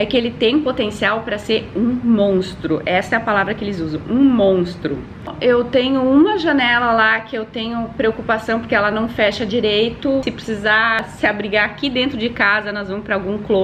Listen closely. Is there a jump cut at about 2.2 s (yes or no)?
no